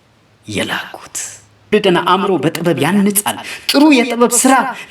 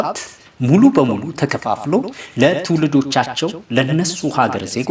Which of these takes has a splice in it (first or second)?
first